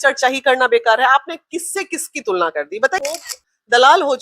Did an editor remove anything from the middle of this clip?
yes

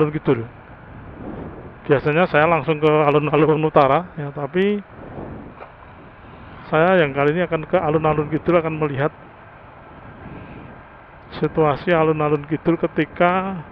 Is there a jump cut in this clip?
no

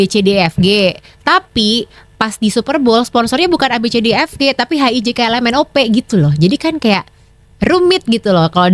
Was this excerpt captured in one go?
yes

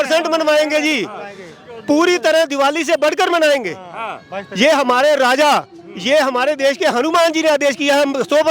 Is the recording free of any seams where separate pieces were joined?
yes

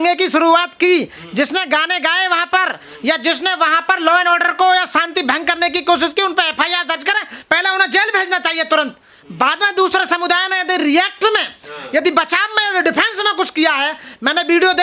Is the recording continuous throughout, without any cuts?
yes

